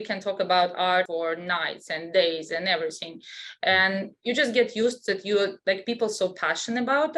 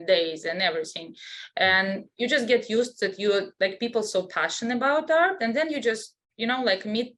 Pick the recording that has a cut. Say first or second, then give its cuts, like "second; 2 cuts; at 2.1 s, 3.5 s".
first; 1 cut; at 1.1 s